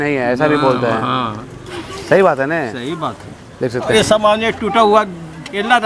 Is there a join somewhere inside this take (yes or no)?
yes